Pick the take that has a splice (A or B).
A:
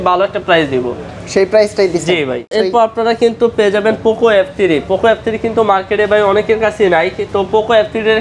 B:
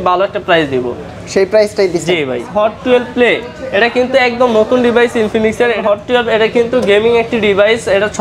B